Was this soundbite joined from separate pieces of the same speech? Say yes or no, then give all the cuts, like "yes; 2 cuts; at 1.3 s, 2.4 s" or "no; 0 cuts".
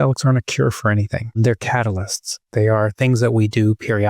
yes; 1 cut; at 1.4 s